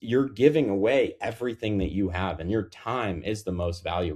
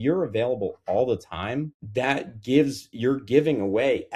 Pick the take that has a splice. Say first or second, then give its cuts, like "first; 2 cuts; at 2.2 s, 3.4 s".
second; 1 cut; at 1.8 s